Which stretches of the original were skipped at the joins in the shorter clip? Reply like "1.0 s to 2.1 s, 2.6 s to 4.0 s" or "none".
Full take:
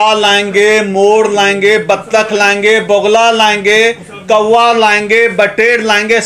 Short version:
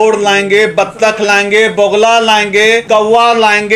3.9 s to 4.2 s